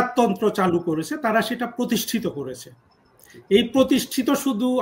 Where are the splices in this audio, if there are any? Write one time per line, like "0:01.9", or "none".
none

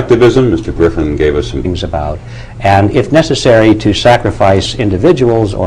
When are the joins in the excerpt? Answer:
none

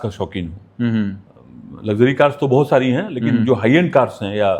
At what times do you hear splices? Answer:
none

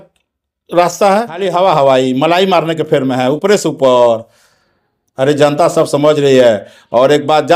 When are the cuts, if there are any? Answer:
0:01.5

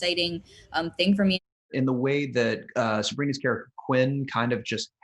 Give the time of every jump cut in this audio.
0:01.5

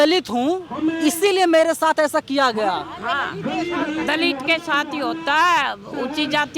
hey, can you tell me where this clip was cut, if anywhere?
none

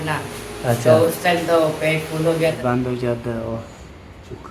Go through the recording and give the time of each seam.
0:02.6

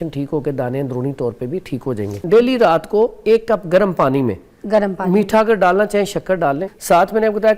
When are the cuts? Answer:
0:02.1
0:06.7

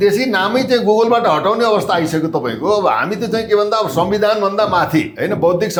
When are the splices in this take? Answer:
none

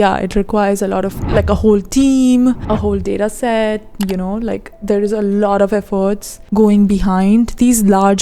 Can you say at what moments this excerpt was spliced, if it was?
0:02.6
0:03.9
0:06.3

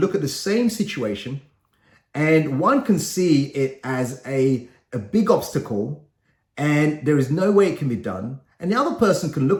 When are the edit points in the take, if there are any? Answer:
none

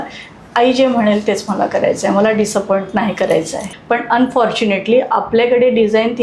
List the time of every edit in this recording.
0:03.7

